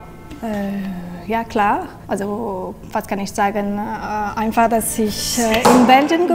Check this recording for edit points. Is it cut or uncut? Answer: uncut